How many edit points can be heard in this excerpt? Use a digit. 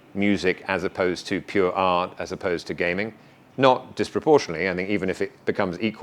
0